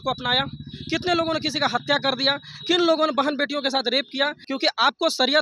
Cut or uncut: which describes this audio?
cut